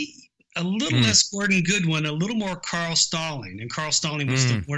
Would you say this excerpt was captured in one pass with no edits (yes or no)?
yes